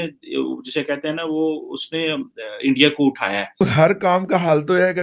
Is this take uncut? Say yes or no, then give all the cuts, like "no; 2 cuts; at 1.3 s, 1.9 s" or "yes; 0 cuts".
no; 1 cut; at 3.5 s